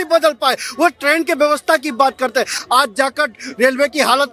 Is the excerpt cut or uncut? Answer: uncut